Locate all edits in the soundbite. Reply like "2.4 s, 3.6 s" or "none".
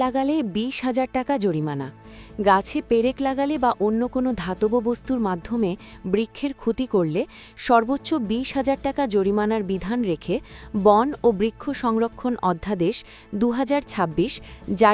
none